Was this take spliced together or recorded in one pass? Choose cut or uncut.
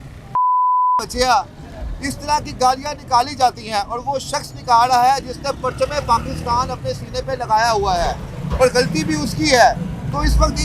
uncut